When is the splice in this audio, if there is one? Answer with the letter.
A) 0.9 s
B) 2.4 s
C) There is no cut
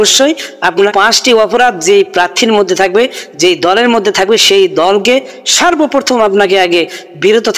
A